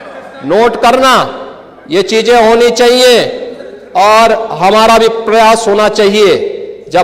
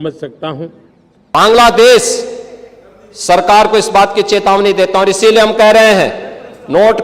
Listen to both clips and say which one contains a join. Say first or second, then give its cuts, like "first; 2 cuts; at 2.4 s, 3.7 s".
second; 1 cut; at 1.2 s